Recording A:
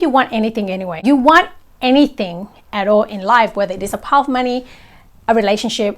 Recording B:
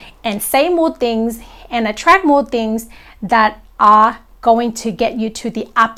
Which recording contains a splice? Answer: A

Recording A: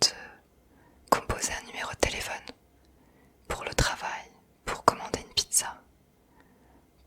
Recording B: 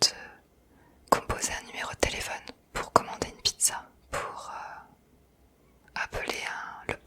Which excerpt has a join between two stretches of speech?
B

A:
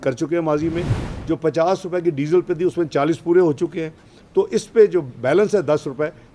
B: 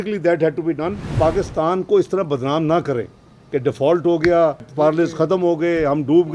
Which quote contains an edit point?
B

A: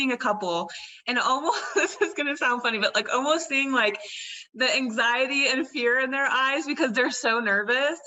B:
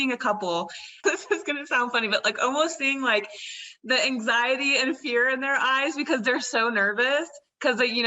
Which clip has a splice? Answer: B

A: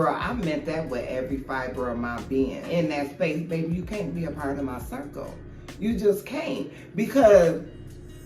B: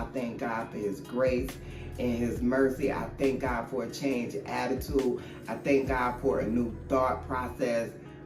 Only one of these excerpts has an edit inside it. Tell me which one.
A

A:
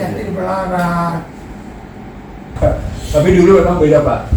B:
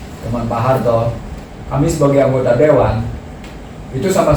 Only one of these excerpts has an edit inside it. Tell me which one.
A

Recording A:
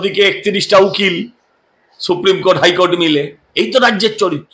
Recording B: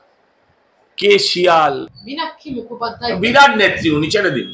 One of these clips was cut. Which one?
B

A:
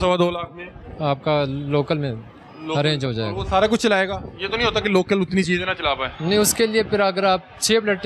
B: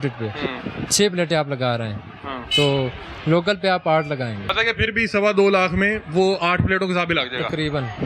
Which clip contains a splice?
B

